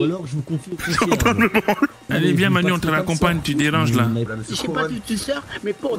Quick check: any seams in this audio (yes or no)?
yes